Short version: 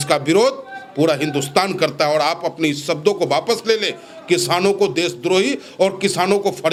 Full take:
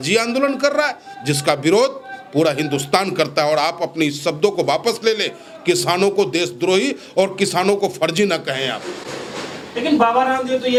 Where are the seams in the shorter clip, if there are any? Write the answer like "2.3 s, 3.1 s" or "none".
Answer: none